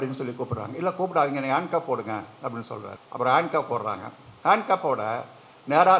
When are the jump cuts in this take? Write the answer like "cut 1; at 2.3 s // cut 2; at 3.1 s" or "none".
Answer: cut 1; at 3.0 s